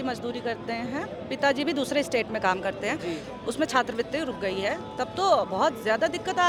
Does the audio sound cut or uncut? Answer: uncut